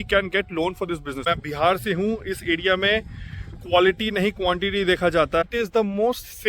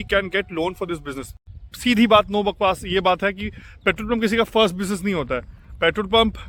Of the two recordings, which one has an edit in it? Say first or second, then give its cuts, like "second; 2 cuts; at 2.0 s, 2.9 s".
first; 2 cuts; at 1.2 s, 5.5 s